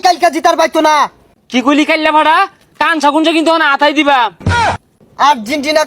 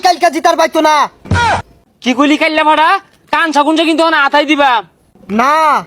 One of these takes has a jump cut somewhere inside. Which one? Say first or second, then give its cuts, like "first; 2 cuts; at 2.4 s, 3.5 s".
first; 2 cuts; at 1.2 s, 4.8 s